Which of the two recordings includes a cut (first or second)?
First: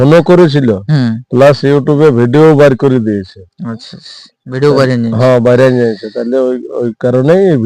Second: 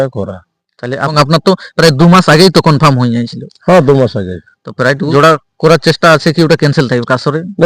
second